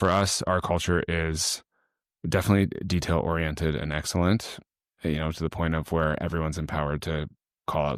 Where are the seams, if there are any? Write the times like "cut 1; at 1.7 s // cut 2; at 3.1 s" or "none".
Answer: none